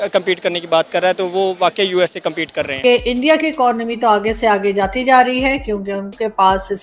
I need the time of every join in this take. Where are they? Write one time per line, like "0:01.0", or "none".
0:02.7